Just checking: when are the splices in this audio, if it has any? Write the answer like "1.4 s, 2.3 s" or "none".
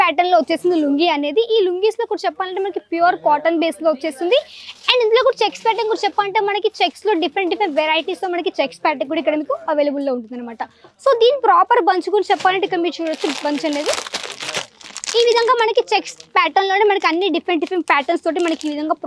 none